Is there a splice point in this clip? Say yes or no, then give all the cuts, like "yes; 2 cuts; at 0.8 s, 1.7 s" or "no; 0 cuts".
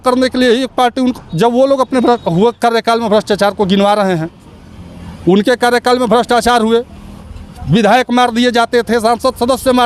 no; 0 cuts